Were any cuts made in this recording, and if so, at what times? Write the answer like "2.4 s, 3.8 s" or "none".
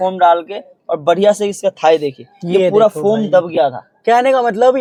none